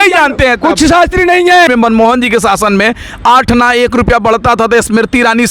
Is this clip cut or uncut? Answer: cut